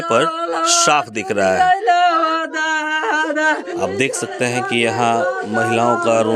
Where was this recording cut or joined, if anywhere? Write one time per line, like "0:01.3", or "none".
none